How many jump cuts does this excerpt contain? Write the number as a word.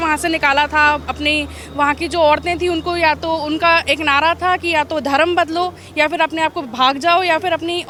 zero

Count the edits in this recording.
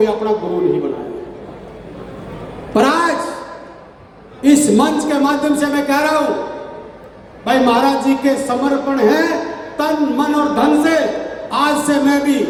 zero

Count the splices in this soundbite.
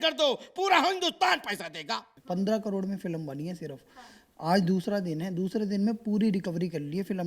one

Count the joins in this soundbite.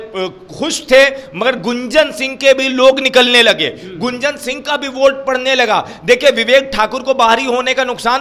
zero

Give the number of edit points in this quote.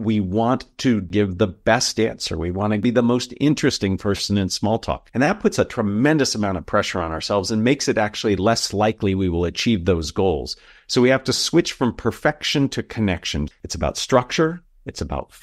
four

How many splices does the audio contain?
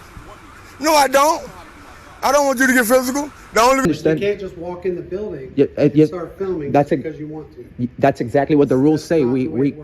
one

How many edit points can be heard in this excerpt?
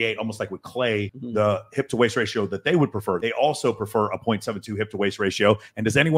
two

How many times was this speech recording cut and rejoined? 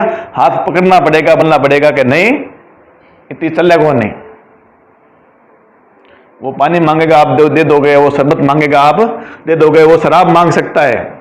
one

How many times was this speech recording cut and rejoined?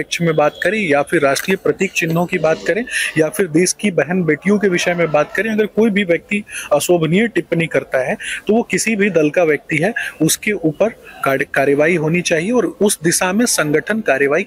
zero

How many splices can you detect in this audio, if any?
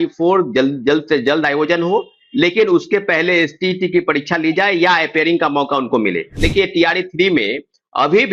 one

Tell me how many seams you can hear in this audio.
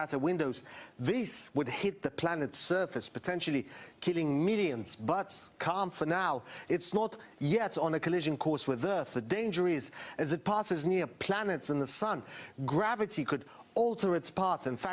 one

